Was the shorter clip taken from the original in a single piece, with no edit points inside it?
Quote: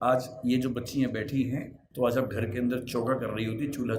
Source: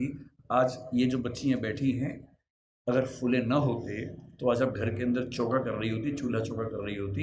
no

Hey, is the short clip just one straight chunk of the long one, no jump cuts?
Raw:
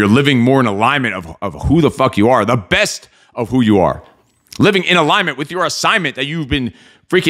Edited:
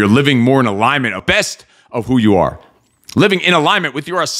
no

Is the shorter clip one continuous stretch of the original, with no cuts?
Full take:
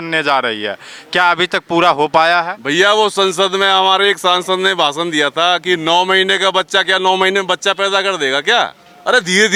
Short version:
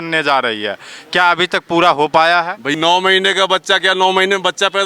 no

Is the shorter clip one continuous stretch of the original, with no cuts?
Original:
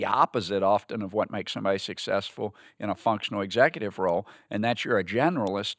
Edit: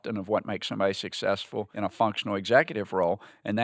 no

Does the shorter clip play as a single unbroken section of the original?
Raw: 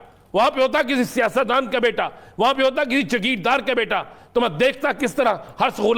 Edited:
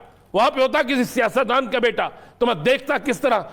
no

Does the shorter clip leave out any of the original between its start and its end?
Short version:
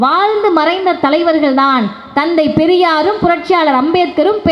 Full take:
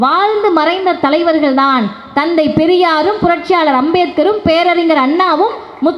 no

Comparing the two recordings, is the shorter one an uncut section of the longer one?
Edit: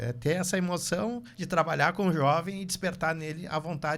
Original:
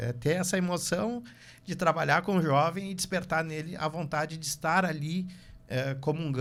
no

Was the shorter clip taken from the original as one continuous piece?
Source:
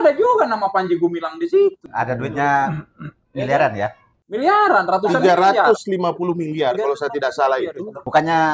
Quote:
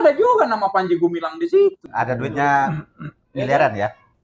yes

